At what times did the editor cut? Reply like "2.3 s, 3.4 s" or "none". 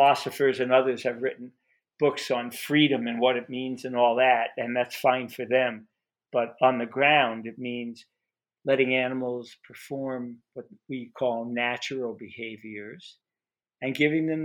none